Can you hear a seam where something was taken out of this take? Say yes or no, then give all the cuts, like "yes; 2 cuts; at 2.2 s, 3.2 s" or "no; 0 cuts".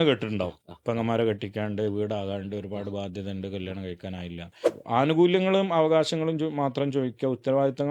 yes; 1 cut; at 4.7 s